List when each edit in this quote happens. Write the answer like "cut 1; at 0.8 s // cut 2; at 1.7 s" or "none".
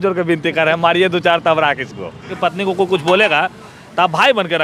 cut 1; at 2.3 s